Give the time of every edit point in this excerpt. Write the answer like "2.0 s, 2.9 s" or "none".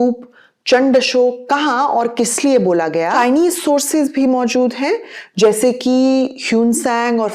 3.1 s

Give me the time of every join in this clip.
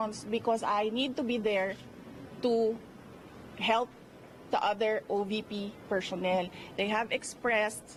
none

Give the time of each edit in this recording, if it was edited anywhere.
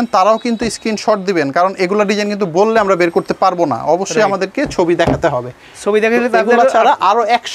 none

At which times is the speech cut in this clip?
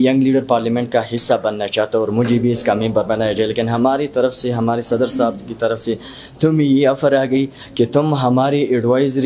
none

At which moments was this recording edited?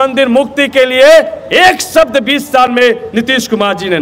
none

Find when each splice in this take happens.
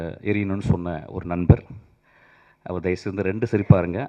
none

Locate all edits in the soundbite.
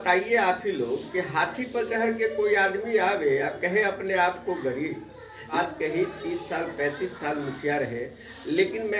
5.5 s

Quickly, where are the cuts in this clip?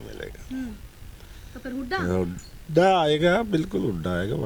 none

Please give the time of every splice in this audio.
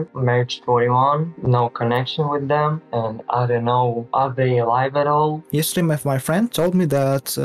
5.4 s

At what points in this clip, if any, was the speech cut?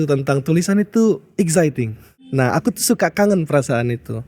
2.5 s

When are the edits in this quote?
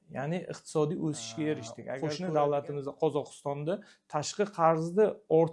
1.9 s

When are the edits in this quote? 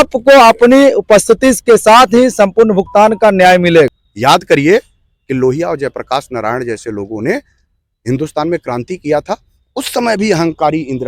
4.0 s

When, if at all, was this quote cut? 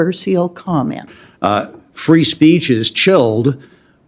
1.2 s

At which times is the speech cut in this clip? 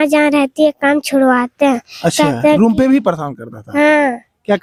none

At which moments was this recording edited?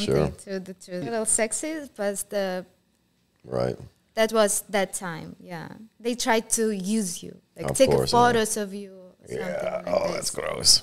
1.0 s

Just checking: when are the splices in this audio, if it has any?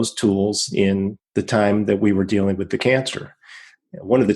1.2 s

